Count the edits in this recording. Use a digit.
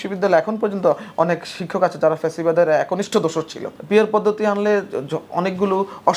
1